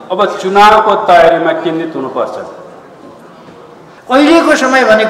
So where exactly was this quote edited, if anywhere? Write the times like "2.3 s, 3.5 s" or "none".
4.0 s